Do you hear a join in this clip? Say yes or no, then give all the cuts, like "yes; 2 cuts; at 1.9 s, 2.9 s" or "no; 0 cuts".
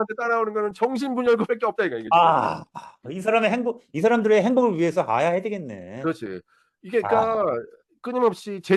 no; 0 cuts